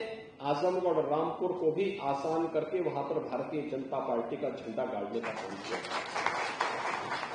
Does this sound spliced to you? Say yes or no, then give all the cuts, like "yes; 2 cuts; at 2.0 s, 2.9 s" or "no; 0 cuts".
no; 0 cuts